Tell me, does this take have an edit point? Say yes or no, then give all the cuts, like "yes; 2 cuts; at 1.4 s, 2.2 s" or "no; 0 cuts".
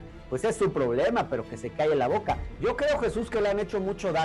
yes; 1 cut; at 2.5 s